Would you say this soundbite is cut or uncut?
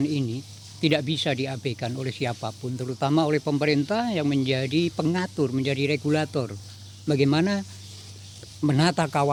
uncut